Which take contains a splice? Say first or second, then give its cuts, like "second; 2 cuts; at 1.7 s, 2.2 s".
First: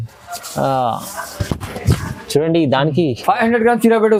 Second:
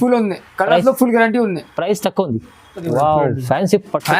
second; 1 cut; at 2.9 s